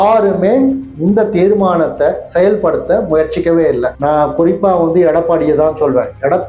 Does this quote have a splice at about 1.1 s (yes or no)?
no